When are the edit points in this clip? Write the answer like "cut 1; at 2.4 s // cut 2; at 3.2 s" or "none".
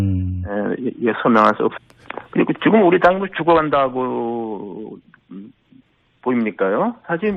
none